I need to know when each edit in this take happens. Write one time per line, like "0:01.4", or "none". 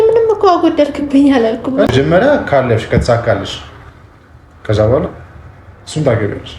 0:01.9